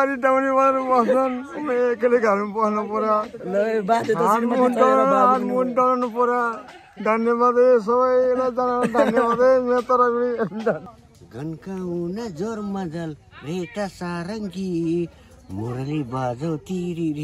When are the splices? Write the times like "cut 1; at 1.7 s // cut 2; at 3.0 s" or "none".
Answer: cut 1; at 10.7 s

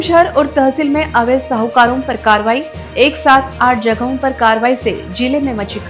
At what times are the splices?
none

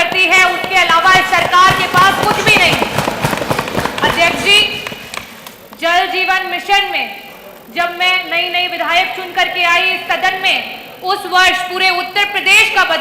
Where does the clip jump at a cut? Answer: none

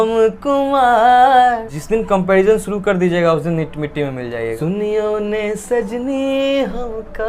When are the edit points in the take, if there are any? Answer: cut 1; at 1.7 s // cut 2; at 4.6 s

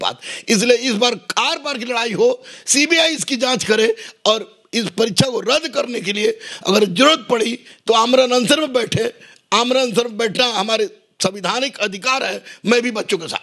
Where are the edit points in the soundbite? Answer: none

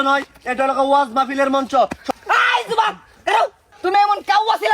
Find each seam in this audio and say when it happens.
cut 1; at 2.0 s // cut 2; at 3.8 s

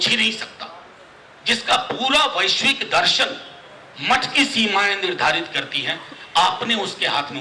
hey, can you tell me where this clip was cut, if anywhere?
none

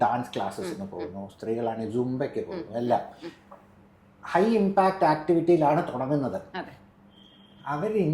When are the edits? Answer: none

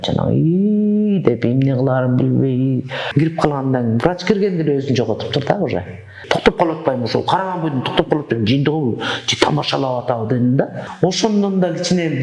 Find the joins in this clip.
cut 1; at 3.0 s // cut 2; at 6.1 s // cut 3; at 10.9 s

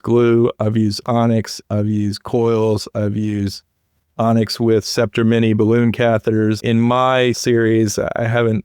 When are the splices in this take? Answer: cut 1; at 6.6 s // cut 2; at 7.4 s

